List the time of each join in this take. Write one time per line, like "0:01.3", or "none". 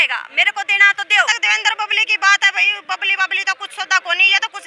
0:01.3